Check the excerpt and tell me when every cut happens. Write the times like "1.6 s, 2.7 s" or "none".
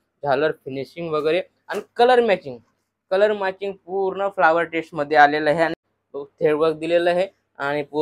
5.9 s